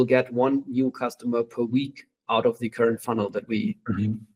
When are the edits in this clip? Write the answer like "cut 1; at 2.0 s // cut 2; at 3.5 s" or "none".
none